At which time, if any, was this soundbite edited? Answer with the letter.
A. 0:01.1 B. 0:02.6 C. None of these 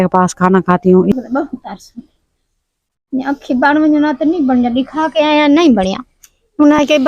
A